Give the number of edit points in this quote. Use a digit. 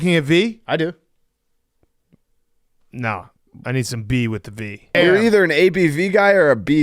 1